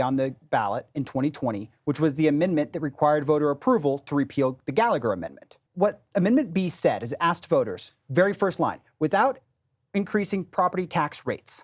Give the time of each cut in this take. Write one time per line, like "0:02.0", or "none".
0:05.6